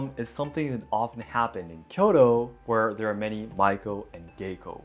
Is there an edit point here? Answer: no; 0 cuts

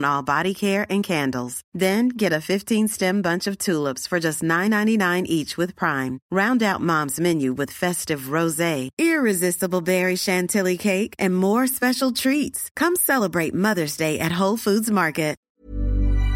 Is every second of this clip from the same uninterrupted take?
no; 1 cut; at 15.5 s

